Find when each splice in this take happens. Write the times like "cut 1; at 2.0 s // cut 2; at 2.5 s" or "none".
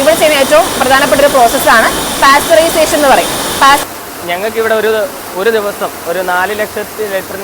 cut 1; at 3.8 s

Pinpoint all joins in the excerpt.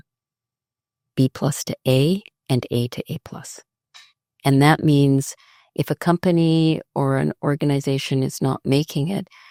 none

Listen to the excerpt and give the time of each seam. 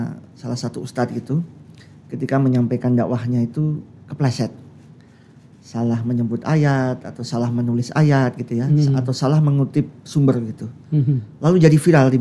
none

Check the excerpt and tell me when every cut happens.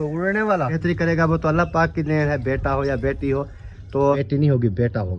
cut 1; at 0.8 s // cut 2; at 4.2 s

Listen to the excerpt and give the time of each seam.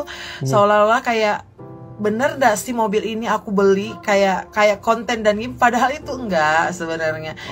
none

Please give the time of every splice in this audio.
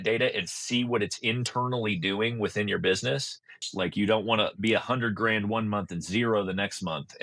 cut 1; at 3.5 s

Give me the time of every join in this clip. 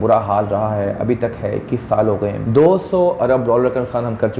cut 1; at 2.4 s

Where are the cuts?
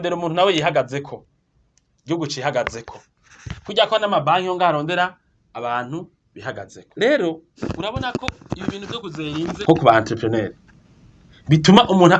cut 1; at 6.8 s // cut 2; at 7.5 s // cut 3; at 9.6 s

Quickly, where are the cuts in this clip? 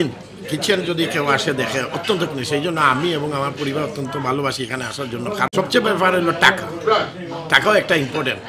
cut 1; at 5.5 s

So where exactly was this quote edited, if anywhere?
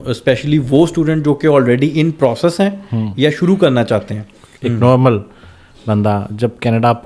cut 1; at 4.4 s

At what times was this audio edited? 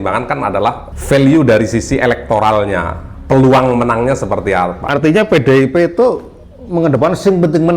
cut 1; at 0.9 s // cut 2; at 4.8 s

